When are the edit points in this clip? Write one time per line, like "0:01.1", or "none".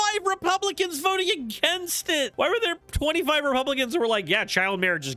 none